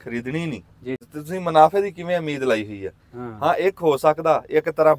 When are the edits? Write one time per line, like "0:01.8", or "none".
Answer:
0:01.1

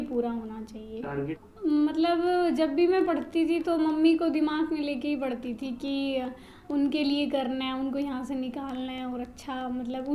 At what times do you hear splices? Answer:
0:01.4

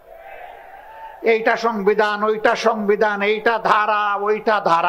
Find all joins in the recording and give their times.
none

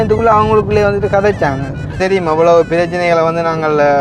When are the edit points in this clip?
0:02.0

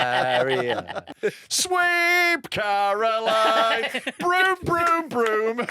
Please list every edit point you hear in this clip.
0:01.0

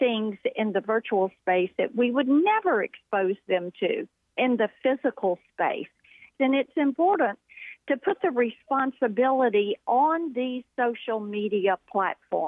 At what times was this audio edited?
0:04.2
0:06.3

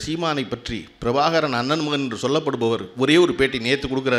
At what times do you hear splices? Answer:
none

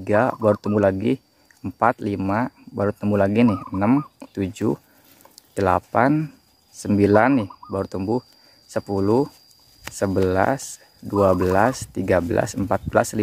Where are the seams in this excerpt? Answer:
none

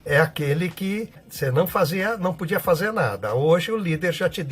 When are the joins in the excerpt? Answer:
0:01.3

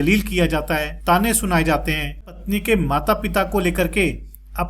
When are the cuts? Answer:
0:00.9
0:02.3

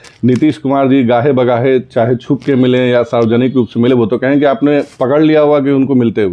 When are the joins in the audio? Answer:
none

